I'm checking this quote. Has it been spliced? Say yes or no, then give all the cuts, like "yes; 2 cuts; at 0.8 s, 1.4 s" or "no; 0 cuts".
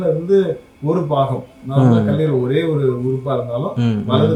no; 0 cuts